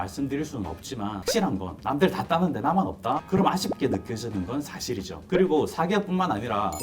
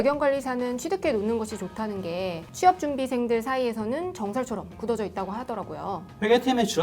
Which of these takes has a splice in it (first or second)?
first